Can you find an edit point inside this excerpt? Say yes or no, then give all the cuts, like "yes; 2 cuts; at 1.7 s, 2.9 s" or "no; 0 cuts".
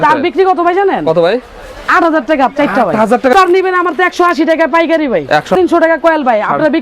yes; 2 cuts; at 3.3 s, 5.5 s